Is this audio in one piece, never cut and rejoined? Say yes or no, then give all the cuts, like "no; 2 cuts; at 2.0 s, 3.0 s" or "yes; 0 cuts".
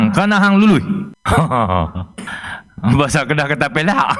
no; 1 cut; at 1.1 s